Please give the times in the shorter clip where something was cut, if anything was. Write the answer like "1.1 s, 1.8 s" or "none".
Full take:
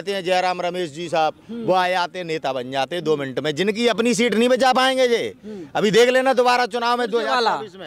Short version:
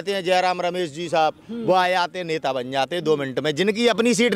none

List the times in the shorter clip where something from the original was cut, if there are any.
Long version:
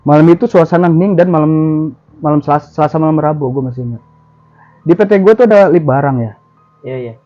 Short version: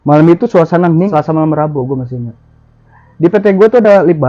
1.1 s

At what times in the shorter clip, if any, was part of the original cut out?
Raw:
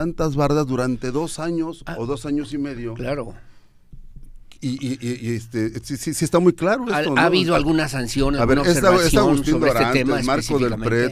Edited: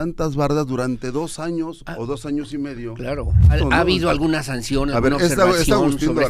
3.5 s

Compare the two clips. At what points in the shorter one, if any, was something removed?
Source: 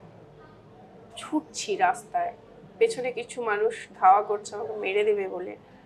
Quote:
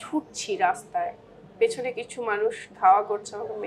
none

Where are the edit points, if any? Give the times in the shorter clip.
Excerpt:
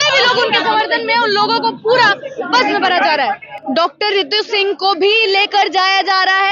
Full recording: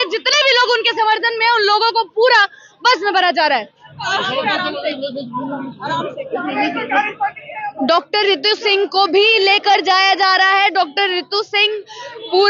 3.5 s

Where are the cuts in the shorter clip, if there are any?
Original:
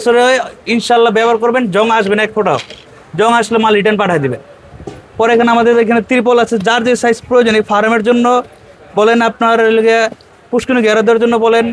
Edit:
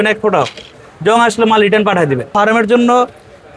2.3 s

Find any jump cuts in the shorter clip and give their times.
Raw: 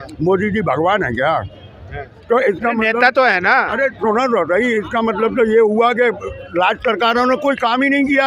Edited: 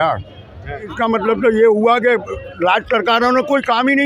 0.9 s

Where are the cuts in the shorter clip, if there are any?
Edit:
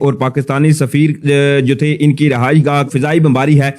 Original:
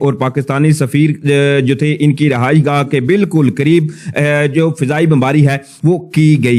2.9 s

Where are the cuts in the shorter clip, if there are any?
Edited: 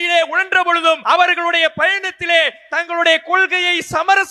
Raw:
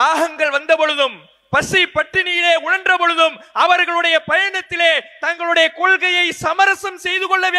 1.0 s

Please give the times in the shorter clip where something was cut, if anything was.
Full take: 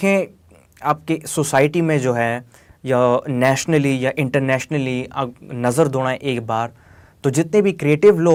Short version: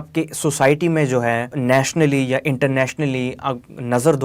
1.6 s

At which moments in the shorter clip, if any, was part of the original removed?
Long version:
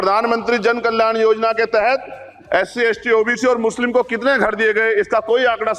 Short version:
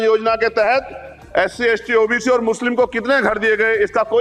none

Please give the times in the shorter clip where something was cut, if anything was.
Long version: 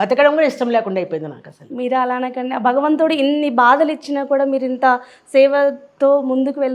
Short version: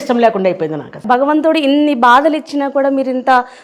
0.9 s

